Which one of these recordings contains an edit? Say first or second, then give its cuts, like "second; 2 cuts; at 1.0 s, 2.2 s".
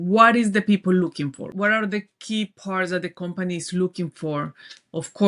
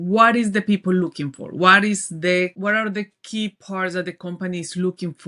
first; 1 cut; at 1.5 s